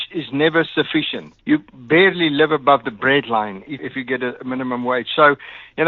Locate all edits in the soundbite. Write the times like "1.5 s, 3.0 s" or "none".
3.8 s